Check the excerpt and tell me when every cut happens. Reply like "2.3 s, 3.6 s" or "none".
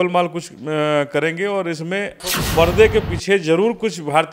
2.2 s